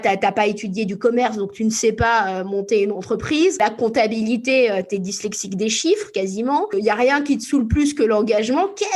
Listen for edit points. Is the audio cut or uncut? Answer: cut